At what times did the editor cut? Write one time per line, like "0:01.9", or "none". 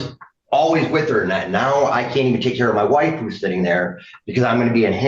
none

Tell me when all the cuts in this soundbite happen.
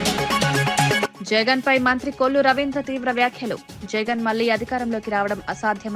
0:01.0

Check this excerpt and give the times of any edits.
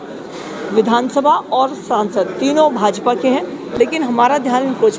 0:03.6

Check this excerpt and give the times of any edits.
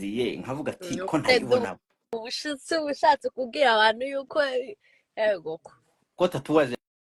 none

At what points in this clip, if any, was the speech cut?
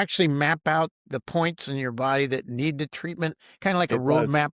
0:01.0

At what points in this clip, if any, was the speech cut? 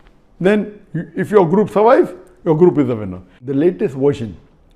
0:03.4

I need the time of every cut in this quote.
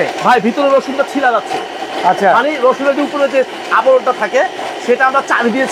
none

